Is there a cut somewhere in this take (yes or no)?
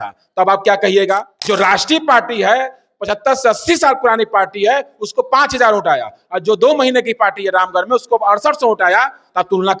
yes